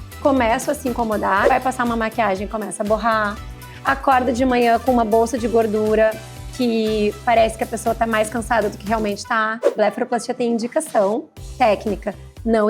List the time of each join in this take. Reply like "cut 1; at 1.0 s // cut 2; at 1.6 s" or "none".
cut 1; at 1.5 s // cut 2; at 9.7 s